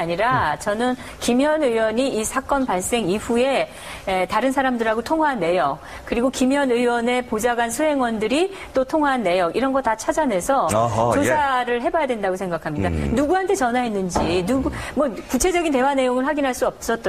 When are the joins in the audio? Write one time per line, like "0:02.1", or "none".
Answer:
0:15.7